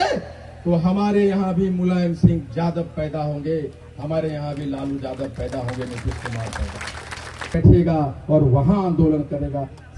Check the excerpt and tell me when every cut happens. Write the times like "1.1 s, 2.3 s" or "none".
7.5 s